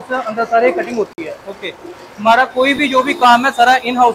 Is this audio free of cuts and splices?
yes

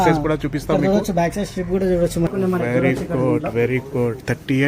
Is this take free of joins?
no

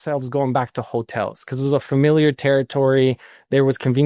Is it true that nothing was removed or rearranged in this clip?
yes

